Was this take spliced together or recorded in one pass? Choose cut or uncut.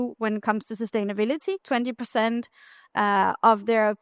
cut